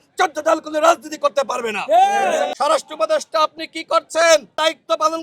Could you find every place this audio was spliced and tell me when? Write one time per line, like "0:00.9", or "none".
0:02.5